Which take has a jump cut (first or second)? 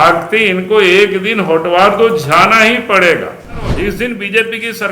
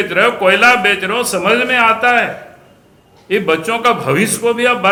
first